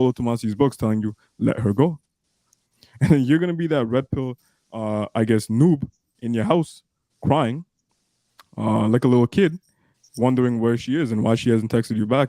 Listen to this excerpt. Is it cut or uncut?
uncut